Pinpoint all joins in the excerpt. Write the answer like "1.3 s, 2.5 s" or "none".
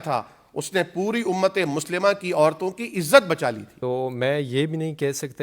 3.7 s

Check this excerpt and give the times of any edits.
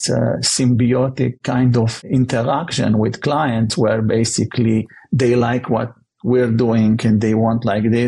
2.0 s

